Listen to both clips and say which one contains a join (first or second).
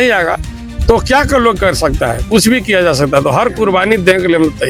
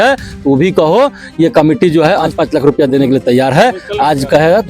second